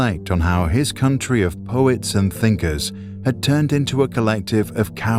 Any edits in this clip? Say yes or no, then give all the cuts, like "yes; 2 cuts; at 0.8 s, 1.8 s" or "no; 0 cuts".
no; 0 cuts